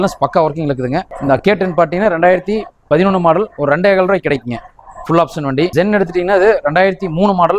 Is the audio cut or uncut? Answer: cut